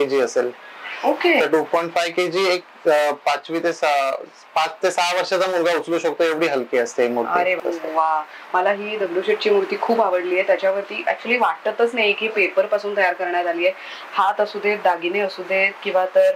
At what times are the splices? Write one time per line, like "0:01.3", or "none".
0:07.6